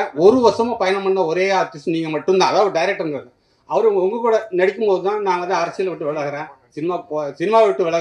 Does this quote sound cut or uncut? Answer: uncut